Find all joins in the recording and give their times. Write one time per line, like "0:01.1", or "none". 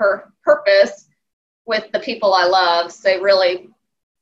none